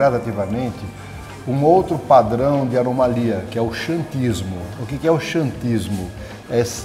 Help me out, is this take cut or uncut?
uncut